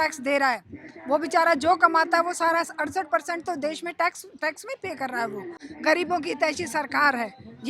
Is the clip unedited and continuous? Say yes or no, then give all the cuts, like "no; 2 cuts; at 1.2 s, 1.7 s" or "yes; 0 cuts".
no; 1 cut; at 5.6 s